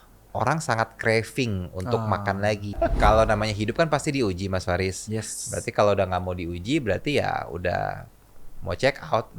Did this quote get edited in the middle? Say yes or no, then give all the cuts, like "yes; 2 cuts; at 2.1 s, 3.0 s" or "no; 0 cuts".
yes; 1 cut; at 2.8 s